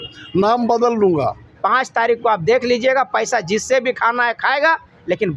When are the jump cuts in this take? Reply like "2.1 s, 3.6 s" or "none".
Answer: 1.5 s